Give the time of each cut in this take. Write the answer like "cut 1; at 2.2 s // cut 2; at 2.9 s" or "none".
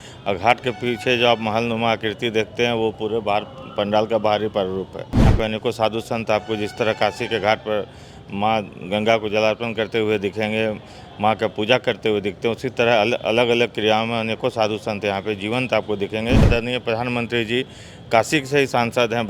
cut 1; at 5.3 s // cut 2; at 16.5 s

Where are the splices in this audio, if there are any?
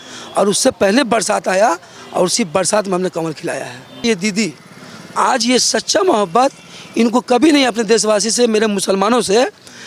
cut 1; at 4.0 s

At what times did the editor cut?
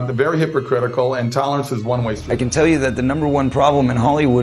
cut 1; at 2.2 s

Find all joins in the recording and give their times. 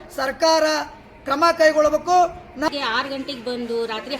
cut 1; at 2.7 s

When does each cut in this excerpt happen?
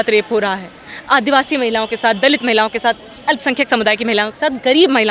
none

